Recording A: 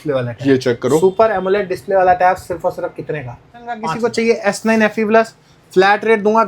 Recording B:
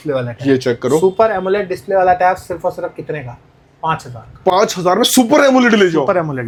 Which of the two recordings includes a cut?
A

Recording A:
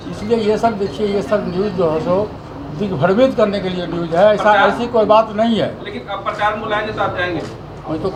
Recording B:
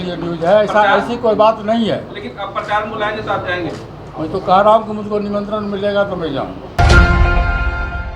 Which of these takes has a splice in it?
B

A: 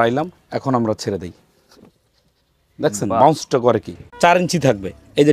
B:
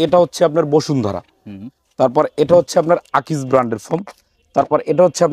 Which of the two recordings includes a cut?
A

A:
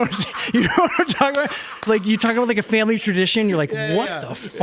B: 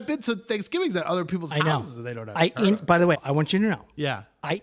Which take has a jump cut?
B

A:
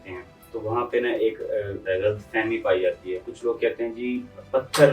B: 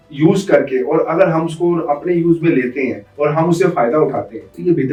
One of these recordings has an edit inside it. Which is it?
A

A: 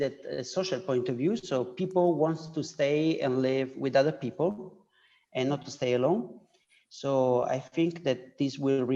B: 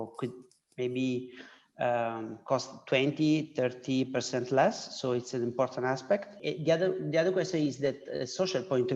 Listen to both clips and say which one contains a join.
B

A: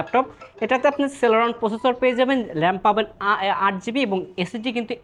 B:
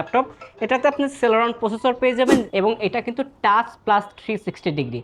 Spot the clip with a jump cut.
B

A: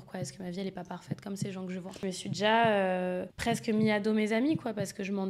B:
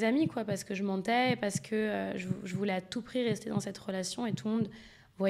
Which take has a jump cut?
A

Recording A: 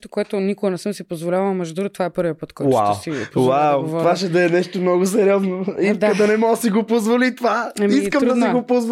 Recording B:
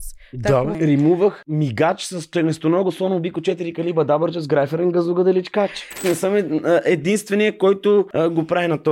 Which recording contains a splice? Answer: B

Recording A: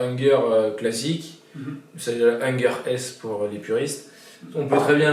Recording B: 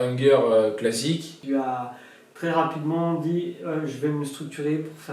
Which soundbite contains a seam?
B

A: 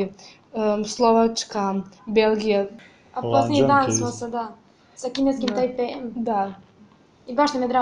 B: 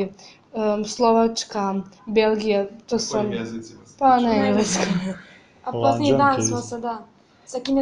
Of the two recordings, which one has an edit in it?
A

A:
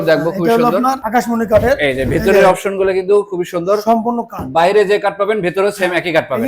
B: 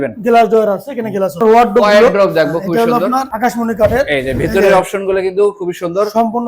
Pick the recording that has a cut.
B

